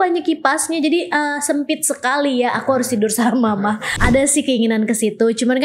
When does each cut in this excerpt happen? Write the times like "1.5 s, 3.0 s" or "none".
3.9 s